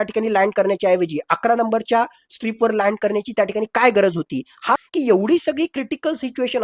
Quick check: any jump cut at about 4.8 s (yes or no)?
yes